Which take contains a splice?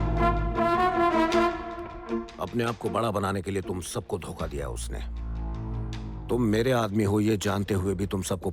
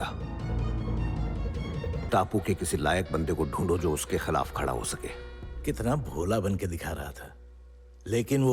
second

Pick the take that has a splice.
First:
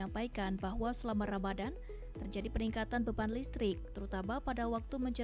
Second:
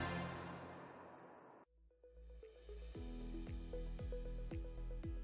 second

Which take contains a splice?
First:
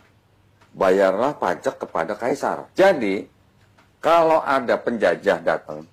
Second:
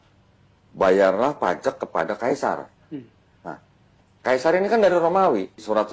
first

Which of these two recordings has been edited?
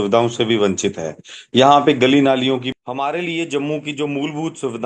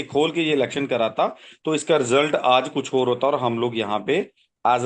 first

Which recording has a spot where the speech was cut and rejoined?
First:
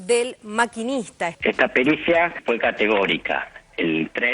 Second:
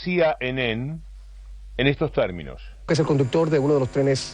first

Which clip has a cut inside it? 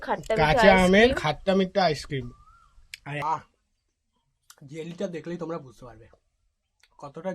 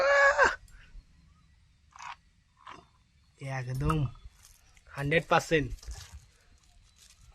first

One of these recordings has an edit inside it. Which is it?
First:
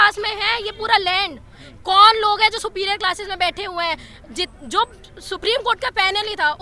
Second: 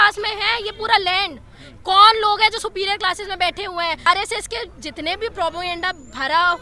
second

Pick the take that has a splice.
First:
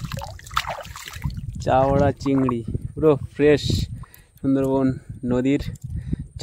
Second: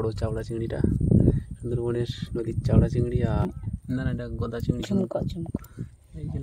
second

